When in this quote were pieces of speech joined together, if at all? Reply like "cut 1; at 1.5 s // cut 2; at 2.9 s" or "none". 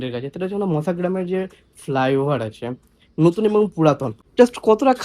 cut 1; at 4.2 s